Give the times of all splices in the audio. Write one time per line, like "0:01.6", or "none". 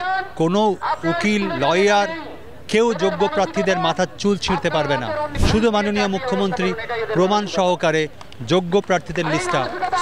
0:05.3